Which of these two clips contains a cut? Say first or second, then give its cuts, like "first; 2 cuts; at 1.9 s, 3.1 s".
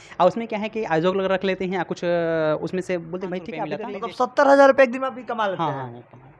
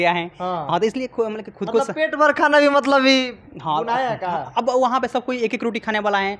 first; 1 cut; at 3.8 s